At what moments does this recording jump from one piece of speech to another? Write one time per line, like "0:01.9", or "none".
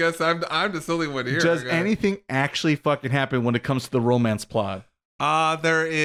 none